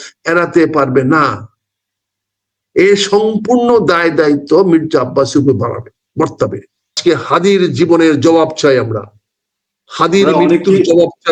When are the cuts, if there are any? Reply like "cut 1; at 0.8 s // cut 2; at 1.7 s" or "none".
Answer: cut 1; at 7.0 s